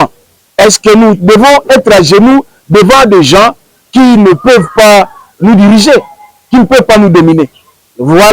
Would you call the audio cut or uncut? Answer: uncut